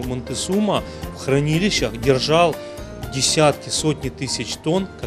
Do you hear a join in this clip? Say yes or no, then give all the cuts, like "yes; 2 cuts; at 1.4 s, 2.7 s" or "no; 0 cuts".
no; 0 cuts